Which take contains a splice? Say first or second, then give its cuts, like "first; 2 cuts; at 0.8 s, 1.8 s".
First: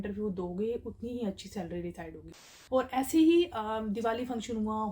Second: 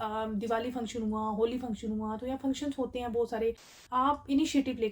first; 1 cut; at 2.6 s